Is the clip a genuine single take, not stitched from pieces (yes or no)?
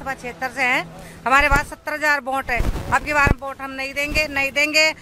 yes